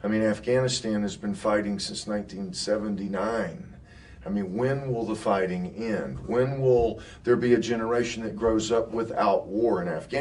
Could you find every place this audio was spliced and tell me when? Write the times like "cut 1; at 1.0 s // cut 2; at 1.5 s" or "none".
none